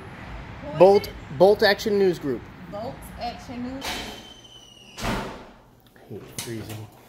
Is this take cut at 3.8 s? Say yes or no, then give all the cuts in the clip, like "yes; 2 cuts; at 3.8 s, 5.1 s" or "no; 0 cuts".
yes; 1 cut; at 3.8 s